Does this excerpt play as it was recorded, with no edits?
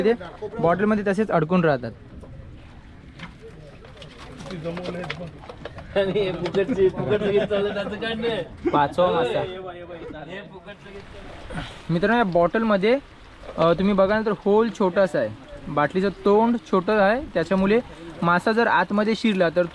no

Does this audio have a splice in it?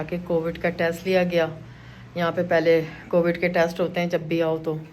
no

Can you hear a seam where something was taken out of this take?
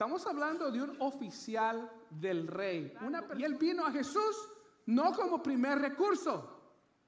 yes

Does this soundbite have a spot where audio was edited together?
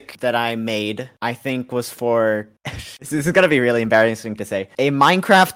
no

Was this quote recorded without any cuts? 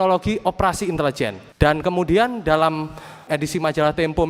no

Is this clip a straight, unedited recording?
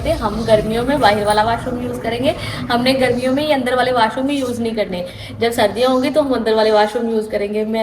yes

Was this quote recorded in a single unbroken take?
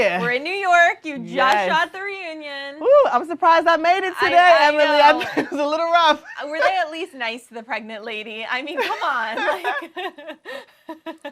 yes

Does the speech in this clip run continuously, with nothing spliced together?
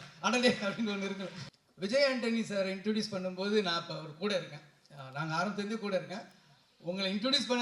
no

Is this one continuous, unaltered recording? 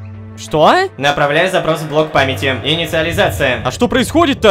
yes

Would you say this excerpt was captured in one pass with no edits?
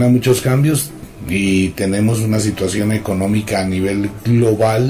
no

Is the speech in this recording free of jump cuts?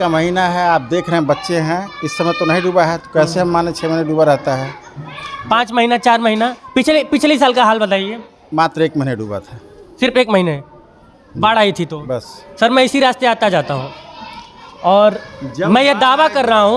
yes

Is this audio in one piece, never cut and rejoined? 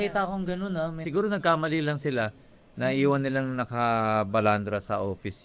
no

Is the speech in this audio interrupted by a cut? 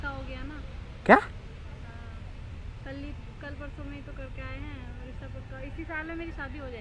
no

